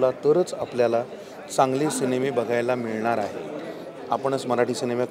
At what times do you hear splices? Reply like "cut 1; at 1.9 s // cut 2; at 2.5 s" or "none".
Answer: none